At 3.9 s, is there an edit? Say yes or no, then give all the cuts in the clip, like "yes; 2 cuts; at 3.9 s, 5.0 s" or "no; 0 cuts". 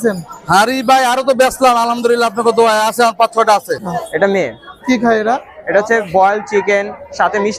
yes; 1 cut; at 3.9 s